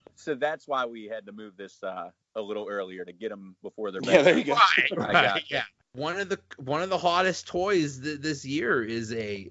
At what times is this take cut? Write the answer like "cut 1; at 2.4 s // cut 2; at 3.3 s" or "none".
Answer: cut 1; at 5.8 s

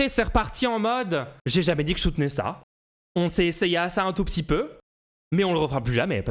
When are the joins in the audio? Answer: cut 1; at 1.4 s

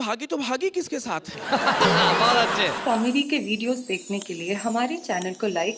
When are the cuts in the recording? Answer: cut 1; at 2.8 s

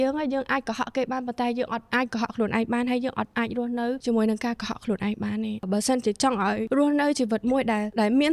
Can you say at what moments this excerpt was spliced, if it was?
none

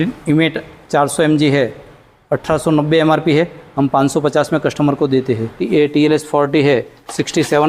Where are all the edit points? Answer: cut 1; at 5.5 s

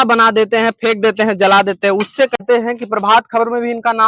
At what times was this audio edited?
cut 1; at 2.4 s

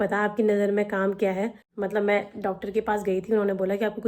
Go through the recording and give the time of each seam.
cut 1; at 1.6 s

